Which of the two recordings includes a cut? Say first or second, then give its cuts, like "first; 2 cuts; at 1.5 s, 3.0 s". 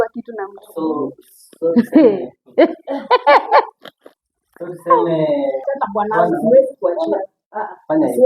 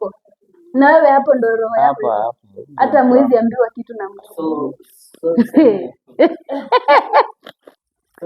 first; 1 cut; at 5.7 s